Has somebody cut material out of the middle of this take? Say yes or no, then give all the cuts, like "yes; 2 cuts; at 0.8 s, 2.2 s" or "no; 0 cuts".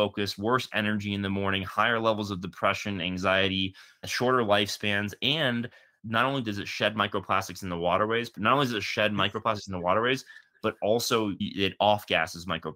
yes; 1 cut; at 8.3 s